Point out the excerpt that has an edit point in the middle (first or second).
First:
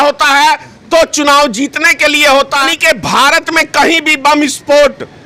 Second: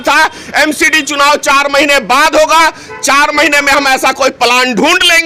first